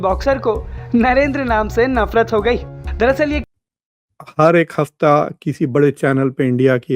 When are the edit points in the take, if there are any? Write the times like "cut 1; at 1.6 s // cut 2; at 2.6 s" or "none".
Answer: cut 1; at 3.4 s

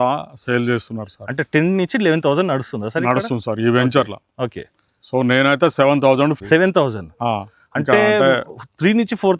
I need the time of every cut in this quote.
cut 1; at 6.4 s

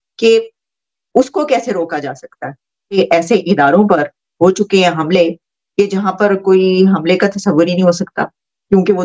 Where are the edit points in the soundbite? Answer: cut 1; at 3.0 s

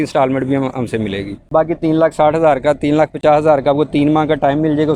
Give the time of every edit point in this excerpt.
cut 1; at 1.3 s

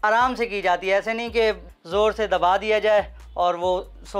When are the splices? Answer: cut 1; at 1.7 s

